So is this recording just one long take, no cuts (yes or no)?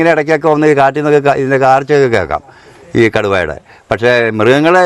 yes